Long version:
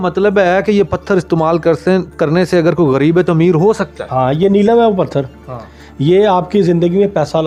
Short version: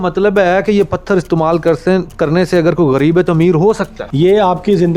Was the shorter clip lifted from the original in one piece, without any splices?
no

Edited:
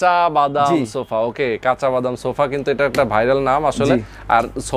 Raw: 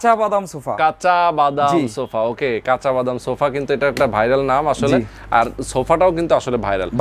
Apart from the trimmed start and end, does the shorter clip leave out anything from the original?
no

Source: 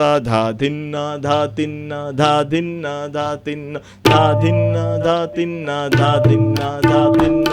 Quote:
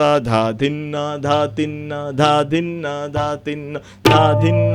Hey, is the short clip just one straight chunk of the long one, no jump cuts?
yes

